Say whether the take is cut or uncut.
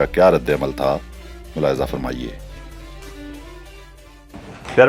uncut